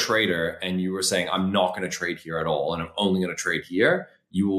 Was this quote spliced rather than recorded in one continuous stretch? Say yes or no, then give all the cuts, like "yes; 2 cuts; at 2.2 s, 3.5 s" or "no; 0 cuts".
no; 0 cuts